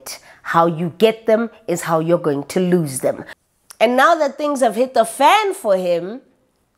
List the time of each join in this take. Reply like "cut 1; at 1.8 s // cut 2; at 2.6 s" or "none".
cut 1; at 3.3 s